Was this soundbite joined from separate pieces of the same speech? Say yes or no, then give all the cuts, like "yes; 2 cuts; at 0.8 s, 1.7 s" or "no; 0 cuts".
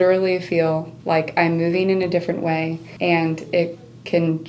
yes; 1 cut; at 2.8 s